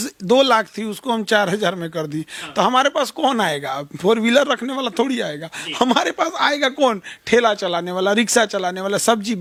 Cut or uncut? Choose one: uncut